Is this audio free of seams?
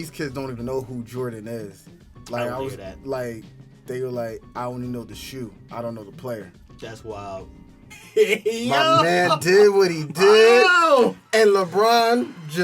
no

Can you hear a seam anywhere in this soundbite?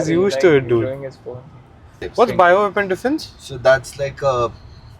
yes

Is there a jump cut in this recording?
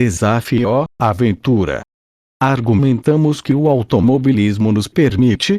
yes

